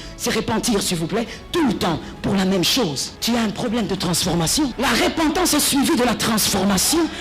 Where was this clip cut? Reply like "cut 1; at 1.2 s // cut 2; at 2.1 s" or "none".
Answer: cut 1; at 3.1 s // cut 2; at 4.7 s